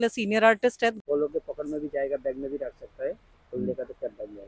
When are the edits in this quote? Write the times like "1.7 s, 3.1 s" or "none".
1.0 s